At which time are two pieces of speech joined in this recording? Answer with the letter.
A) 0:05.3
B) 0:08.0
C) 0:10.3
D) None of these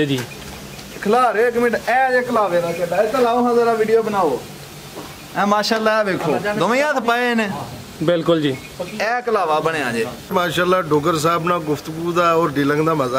C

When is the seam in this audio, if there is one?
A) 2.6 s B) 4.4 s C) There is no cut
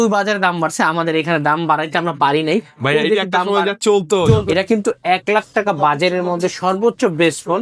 B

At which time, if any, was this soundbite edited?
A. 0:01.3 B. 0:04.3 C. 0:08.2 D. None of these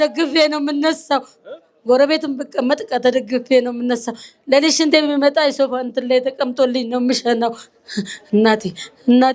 D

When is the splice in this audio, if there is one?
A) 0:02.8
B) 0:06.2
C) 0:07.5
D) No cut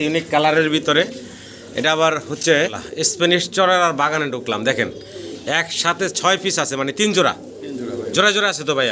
A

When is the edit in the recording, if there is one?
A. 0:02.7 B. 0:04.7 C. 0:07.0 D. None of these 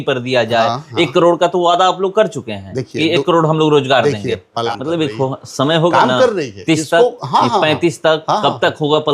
B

